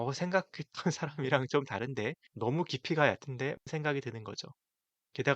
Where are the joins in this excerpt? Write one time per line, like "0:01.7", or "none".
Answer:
0:02.2
0:03.6